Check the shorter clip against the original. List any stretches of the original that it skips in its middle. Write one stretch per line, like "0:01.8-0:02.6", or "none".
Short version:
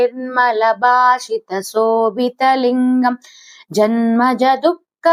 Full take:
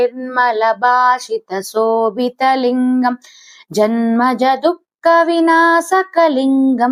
none